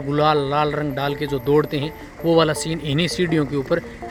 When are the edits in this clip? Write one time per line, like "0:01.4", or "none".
none